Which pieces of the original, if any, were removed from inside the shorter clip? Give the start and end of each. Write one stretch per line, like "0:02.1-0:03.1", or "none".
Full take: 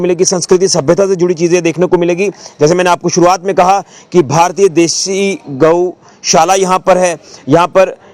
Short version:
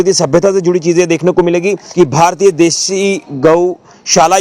0:02.4-0:04.0